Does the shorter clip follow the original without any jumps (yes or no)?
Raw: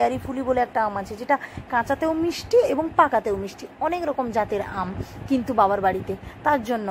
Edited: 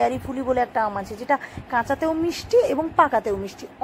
yes